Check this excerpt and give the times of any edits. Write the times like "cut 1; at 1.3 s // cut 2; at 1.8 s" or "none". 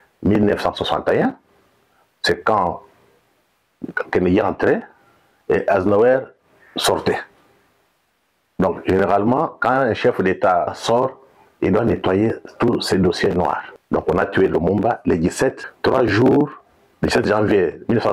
cut 1; at 10.7 s // cut 2; at 13.7 s // cut 3; at 15.7 s